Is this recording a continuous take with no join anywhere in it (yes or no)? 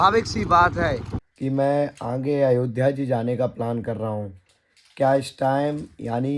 no